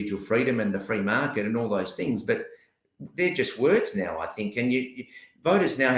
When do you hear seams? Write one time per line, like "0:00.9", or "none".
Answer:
none